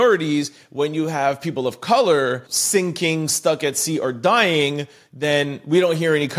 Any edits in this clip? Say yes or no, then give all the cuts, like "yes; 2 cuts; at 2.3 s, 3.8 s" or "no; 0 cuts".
yes; 1 cut; at 2.5 s